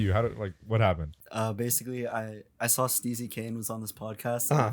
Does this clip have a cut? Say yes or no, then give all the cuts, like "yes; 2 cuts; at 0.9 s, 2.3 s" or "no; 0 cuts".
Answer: yes; 1 cut; at 1.1 s